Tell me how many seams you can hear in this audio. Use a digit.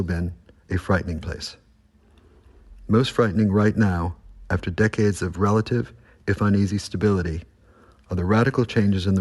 1